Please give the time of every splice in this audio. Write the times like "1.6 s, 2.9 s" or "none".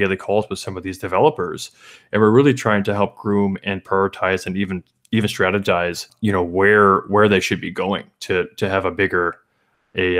none